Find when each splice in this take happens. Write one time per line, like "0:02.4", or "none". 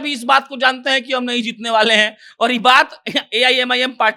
none